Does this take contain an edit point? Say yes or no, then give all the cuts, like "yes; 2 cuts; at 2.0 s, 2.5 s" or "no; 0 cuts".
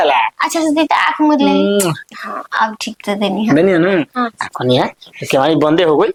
no; 0 cuts